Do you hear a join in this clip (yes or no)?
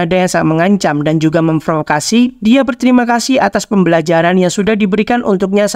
no